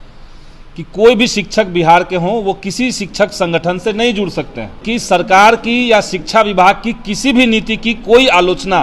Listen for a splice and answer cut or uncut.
cut